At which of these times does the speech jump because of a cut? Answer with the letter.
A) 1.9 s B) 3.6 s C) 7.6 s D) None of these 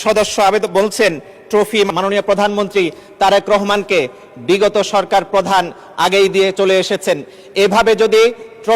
A